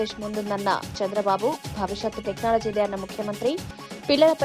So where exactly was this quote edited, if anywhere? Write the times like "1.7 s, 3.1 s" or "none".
none